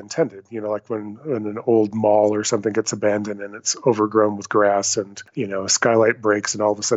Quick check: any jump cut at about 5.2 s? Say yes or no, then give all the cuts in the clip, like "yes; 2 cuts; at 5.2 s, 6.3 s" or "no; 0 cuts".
yes; 1 cut; at 5.2 s